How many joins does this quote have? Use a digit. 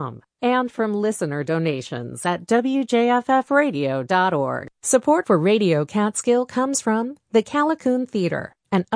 1